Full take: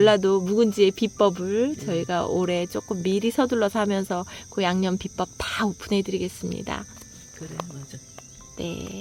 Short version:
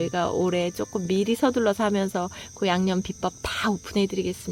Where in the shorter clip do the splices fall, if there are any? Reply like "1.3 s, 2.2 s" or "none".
none

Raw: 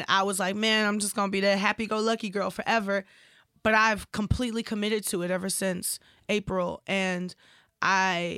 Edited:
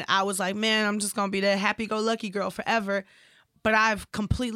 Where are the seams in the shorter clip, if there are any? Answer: none

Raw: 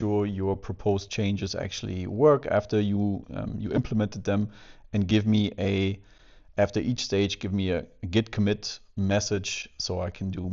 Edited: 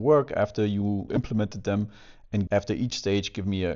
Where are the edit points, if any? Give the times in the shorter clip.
1.1 s, 2.5 s

